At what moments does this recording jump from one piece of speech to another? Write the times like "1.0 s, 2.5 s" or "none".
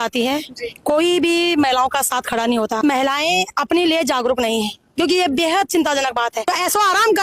2.8 s, 6.5 s